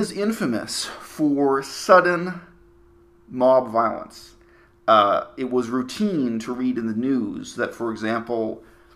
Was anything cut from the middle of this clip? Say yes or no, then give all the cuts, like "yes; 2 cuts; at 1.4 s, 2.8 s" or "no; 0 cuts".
yes; 1 cut; at 3.8 s